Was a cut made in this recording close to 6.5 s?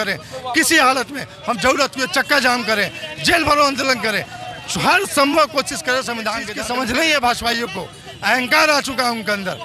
yes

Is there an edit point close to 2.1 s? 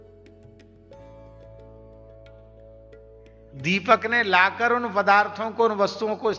yes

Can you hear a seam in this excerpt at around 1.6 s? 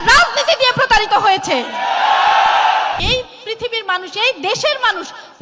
no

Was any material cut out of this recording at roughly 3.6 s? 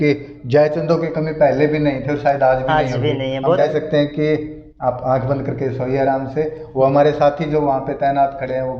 yes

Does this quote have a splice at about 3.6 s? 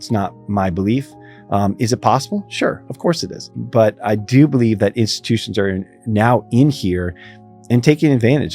yes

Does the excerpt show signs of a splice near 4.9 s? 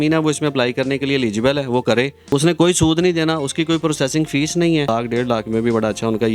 yes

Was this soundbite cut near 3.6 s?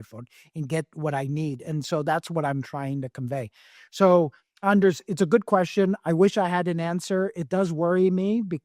no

